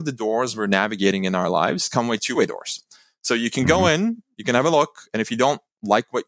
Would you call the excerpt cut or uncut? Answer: cut